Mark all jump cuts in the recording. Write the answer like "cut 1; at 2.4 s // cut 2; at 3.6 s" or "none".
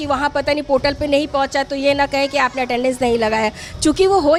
none

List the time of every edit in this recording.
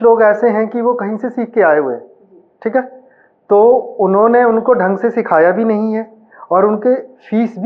none

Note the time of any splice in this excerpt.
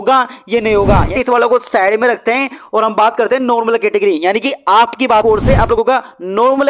cut 1; at 1.1 s // cut 2; at 5.2 s

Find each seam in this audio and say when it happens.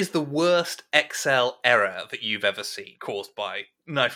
none

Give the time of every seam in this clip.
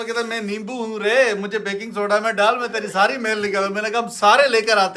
none

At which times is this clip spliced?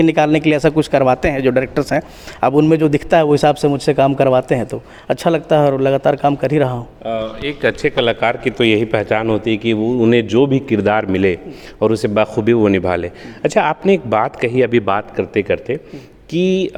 none

